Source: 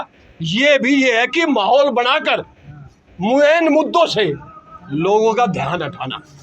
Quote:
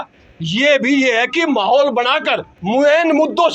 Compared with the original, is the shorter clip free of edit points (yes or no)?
no